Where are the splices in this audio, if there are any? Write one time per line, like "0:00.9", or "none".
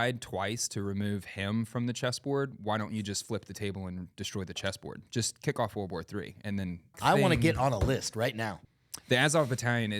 0:06.9
0:08.6